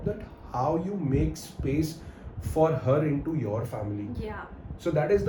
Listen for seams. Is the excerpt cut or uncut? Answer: uncut